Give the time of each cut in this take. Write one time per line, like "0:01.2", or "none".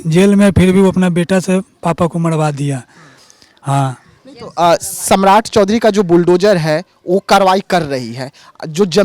none